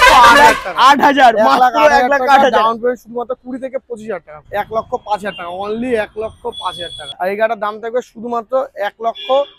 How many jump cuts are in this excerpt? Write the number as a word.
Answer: two